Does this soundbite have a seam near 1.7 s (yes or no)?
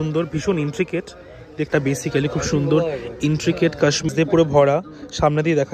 yes